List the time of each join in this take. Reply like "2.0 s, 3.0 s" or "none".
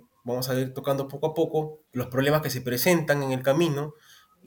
1.8 s